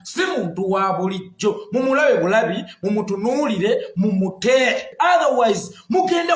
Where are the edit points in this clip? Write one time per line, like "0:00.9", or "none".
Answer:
0:04.9